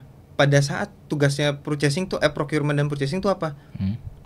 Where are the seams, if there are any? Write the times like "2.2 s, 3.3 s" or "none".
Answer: none